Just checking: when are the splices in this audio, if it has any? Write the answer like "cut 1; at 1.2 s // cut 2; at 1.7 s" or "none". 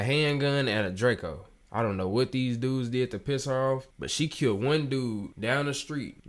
cut 1; at 1.6 s